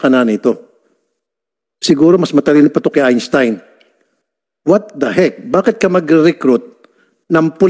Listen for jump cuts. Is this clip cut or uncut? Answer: uncut